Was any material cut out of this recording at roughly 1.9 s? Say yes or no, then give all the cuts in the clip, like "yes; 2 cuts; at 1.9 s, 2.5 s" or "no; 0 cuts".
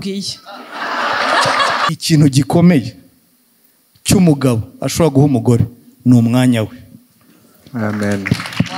yes; 1 cut; at 1.9 s